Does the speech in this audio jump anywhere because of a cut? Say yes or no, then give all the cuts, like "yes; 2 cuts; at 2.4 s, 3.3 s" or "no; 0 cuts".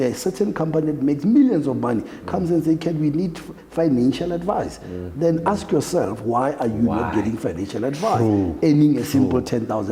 no; 0 cuts